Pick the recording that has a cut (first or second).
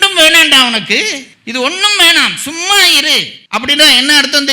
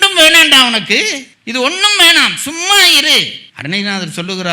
first